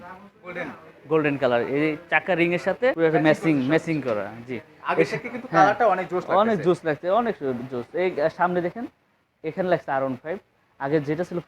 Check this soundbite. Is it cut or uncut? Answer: cut